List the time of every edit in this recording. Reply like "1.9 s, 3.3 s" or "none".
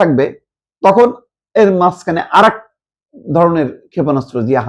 none

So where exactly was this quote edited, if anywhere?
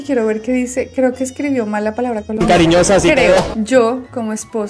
3.5 s

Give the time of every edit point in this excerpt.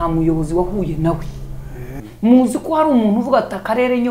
1.9 s

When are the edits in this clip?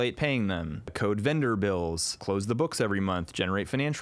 0.9 s, 2.1 s

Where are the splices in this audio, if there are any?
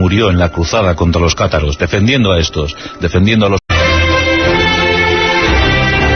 none

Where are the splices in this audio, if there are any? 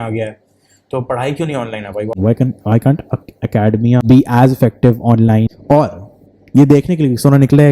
2.2 s, 4.0 s, 5.5 s

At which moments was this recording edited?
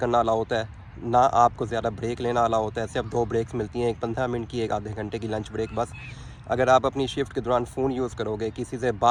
none

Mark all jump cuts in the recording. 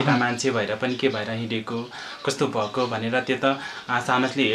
none

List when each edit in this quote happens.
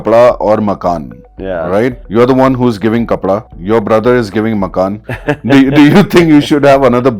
2.0 s, 3.5 s, 5.1 s

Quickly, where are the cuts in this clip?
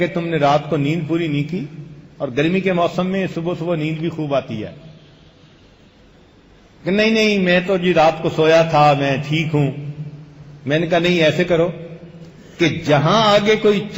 2.8 s

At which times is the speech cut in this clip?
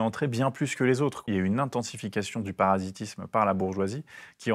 1.2 s

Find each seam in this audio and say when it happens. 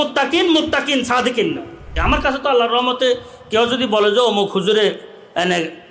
1.9 s

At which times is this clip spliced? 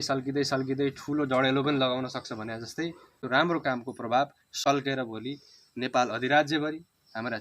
3.1 s

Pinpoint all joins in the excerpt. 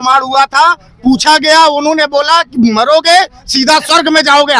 none

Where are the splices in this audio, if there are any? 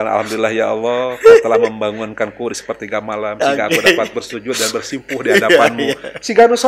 none

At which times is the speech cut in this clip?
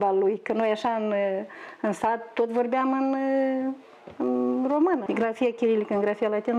5.0 s

